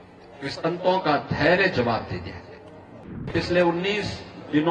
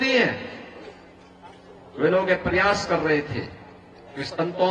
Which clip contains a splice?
first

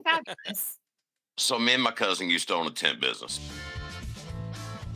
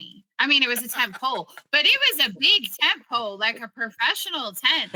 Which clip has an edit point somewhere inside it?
first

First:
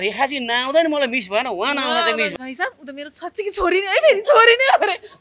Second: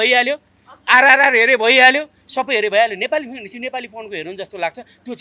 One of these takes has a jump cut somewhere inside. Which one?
first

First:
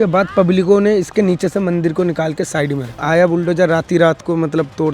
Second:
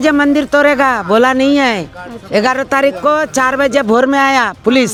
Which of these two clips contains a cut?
first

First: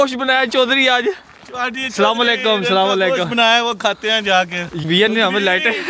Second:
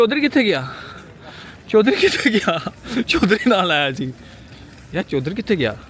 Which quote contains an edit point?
first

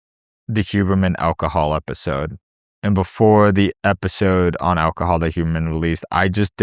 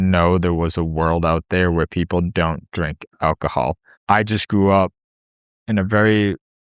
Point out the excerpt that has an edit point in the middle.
second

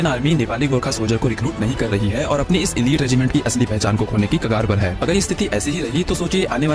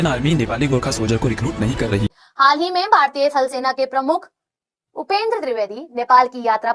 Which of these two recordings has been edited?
second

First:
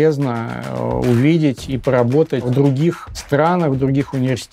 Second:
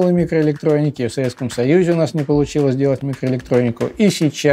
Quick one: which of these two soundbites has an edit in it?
first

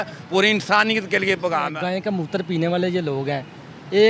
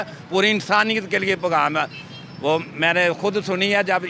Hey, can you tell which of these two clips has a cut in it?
first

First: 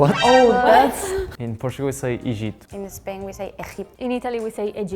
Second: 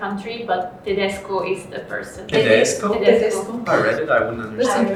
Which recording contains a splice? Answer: first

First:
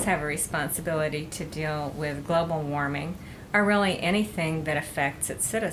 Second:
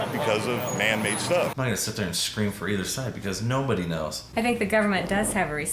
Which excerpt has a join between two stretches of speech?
second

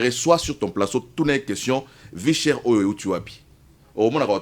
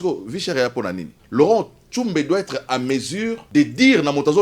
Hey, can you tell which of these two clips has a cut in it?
second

